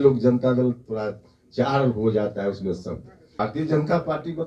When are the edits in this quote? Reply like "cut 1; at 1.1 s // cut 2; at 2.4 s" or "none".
cut 1; at 3.2 s